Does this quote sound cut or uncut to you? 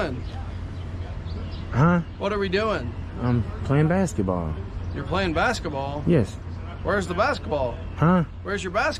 uncut